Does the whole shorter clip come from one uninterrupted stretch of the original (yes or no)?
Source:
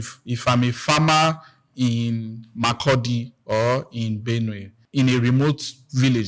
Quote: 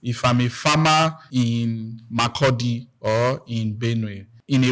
no